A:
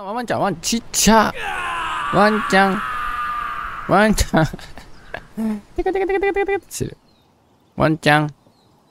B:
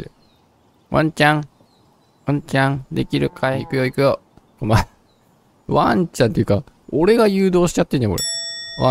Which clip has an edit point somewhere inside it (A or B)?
B